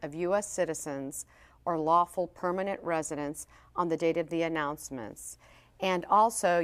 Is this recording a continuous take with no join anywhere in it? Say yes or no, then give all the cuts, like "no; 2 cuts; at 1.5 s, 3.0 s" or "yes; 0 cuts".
yes; 0 cuts